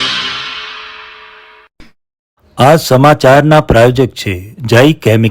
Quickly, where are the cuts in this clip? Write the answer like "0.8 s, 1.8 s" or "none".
1.6 s